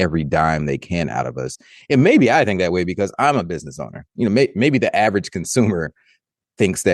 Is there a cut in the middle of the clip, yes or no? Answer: no